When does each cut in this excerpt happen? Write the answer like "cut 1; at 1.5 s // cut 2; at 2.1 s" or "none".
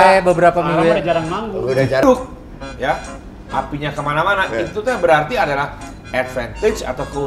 cut 1; at 2.0 s